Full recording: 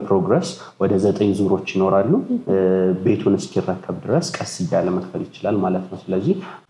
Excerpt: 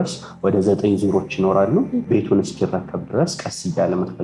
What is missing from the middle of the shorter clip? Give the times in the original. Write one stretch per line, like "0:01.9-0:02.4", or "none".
0:02.4-0:03.0